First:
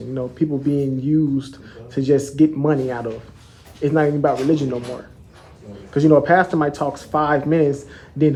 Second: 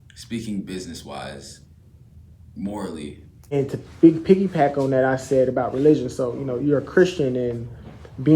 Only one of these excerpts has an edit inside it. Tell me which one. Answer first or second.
second